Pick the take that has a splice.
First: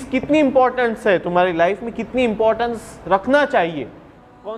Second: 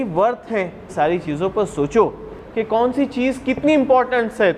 second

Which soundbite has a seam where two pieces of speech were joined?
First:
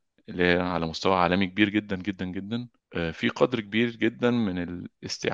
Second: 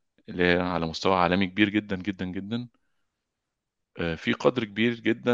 first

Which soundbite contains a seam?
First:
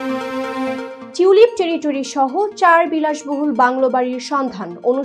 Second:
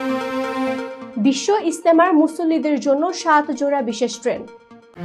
first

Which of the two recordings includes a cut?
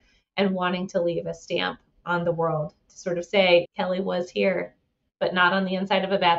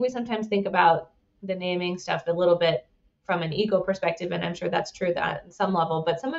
first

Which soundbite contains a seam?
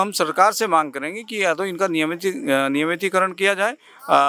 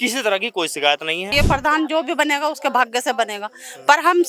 second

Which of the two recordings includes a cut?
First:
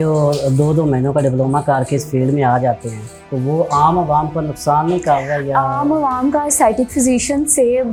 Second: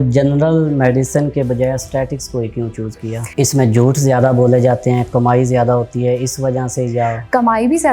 second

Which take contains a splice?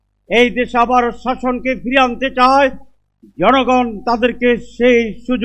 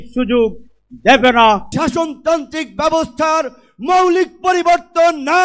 second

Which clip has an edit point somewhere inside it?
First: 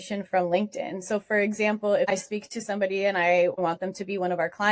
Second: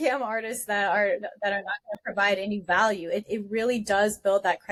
first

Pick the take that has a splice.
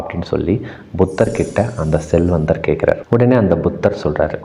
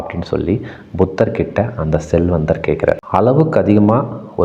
second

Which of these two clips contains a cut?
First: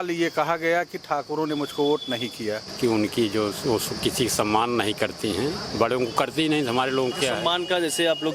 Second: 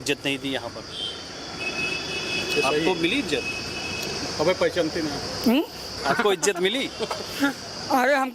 first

